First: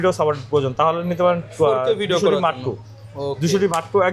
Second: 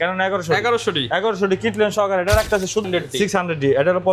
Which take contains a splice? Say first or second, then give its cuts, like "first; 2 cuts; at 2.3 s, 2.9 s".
second; 1 cut; at 2.8 s